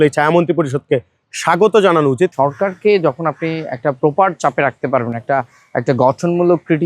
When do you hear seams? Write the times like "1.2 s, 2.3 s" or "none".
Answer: 2.3 s